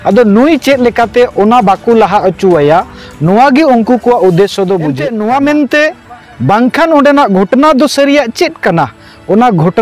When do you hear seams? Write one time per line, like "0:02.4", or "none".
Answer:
0:05.0